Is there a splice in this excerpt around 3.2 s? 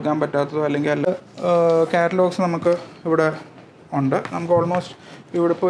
no; 1 cut; at 1.1 s

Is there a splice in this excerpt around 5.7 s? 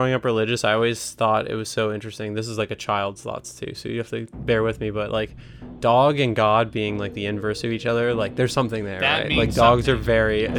no; 0 cuts

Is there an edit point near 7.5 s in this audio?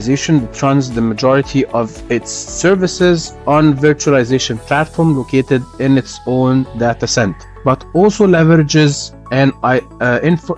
yes; 1 cut; at 7.5 s

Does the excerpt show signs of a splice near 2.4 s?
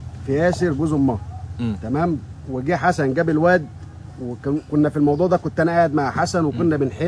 yes; 1 cut; at 2.4 s

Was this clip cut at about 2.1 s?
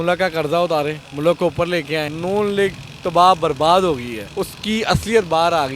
yes; 2 cuts; at 2.1 s, 4.2 s

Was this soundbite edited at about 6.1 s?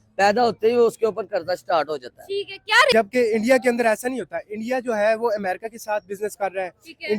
no; 1 cut; at 2.9 s

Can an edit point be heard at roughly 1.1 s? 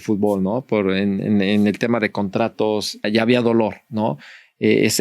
no; 1 cut; at 3.0 s

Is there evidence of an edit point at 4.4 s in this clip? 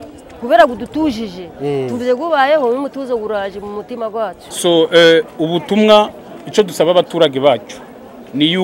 yes; 1 cut; at 4.4 s

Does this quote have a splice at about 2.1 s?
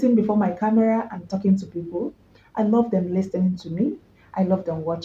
no; 0 cuts

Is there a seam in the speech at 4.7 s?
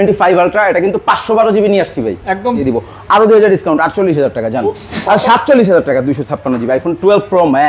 no; 1 cut; at 2.6 s

